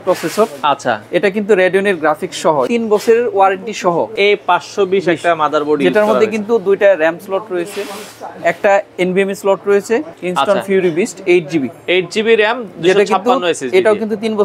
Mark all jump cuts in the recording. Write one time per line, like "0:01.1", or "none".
0:02.7
0:04.1
0:10.2